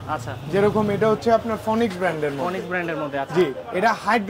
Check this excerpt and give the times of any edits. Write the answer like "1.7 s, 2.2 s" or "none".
none